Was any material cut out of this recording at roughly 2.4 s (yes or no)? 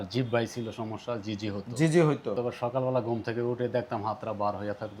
yes